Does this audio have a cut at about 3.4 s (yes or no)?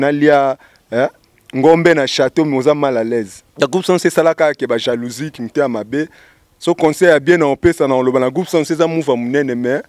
yes